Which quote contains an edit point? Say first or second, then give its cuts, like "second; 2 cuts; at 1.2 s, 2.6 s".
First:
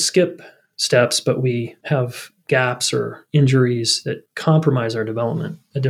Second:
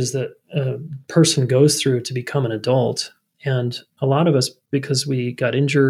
first; 1 cut; at 1.7 s